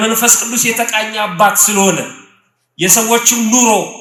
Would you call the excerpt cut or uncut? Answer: uncut